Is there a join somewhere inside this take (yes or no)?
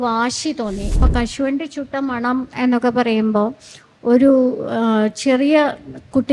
yes